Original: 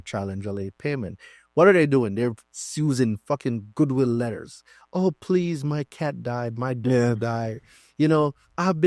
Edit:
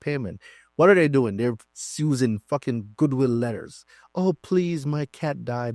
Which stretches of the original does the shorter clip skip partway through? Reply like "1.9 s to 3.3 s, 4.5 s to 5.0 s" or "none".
none